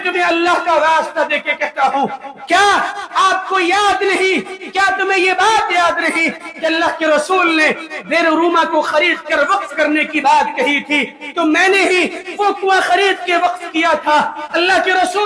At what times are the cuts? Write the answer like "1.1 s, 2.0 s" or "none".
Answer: none

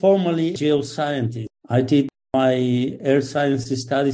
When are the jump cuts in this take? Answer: none

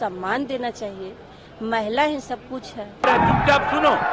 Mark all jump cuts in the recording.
3.1 s

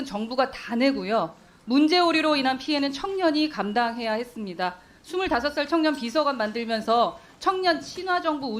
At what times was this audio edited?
none

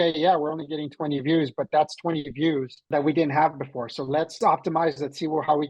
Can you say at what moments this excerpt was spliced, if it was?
2.8 s, 4.4 s

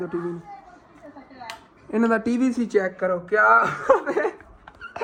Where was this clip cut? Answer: none

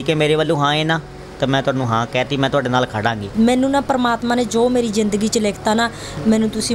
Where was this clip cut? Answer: 3.3 s

